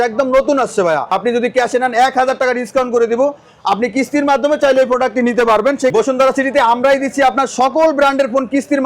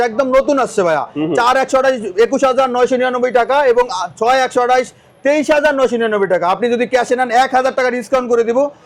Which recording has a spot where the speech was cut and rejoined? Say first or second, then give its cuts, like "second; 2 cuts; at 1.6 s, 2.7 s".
first; 2 cuts; at 1.1 s, 5.9 s